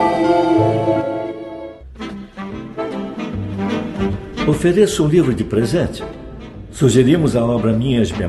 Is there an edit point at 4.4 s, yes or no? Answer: no